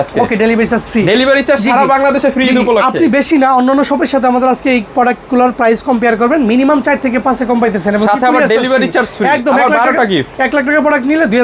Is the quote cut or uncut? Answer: uncut